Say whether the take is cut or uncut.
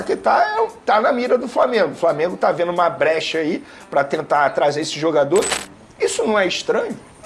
cut